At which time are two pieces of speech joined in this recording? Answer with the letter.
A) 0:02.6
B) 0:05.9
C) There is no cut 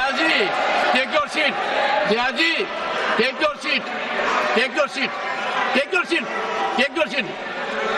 B